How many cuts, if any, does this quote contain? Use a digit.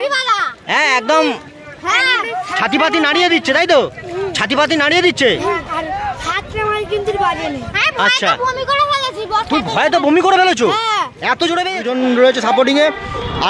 1